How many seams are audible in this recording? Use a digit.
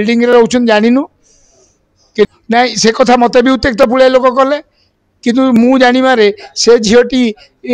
1